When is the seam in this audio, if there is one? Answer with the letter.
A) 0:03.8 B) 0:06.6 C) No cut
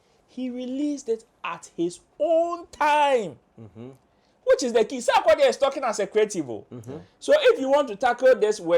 C